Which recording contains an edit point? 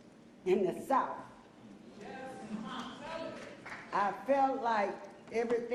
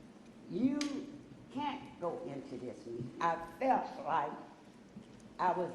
second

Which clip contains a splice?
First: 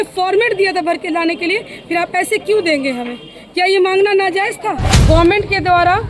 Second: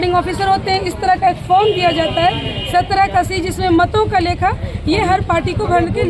first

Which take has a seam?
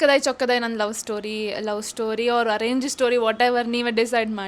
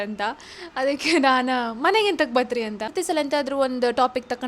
second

